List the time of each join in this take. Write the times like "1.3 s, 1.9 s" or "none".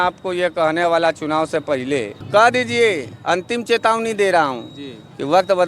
2.2 s